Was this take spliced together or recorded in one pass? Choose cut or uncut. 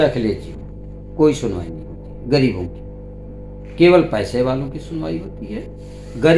uncut